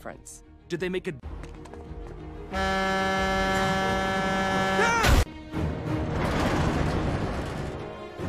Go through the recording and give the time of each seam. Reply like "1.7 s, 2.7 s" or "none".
5.4 s